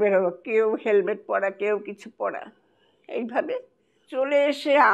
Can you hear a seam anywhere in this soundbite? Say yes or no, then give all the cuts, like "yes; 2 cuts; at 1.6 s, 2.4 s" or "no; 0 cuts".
no; 0 cuts